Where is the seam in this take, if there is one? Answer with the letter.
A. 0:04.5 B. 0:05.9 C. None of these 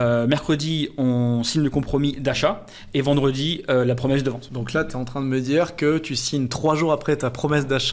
A